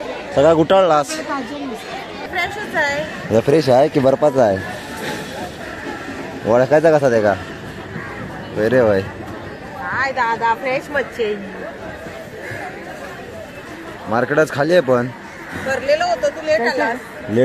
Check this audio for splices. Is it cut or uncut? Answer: cut